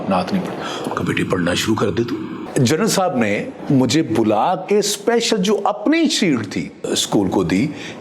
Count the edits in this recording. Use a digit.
3